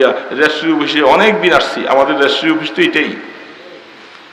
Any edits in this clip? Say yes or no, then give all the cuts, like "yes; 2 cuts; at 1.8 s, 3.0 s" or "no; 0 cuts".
no; 0 cuts